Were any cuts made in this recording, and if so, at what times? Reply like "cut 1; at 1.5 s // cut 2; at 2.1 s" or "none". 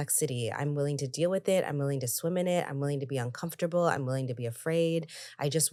none